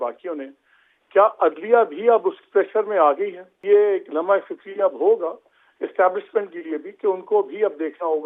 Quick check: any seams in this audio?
yes; 1 cut; at 3.6 s

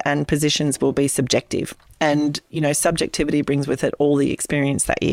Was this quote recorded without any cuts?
yes; 0 cuts

